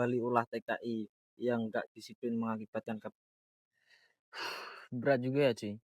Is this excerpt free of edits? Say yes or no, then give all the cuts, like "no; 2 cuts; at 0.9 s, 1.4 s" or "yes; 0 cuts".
no; 1 cut; at 3.1 s